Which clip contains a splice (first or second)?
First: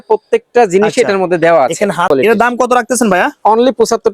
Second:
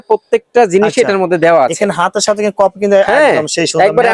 first